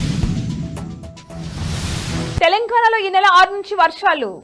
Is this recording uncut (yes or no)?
no